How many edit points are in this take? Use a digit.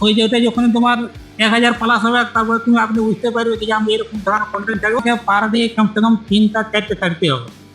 1